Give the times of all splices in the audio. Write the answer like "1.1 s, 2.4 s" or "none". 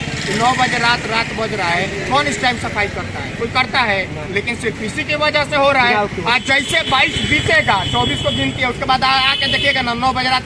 none